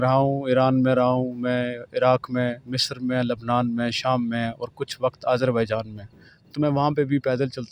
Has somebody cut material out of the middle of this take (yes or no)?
no